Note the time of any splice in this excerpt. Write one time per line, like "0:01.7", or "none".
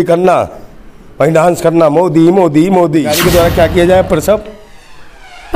0:03.1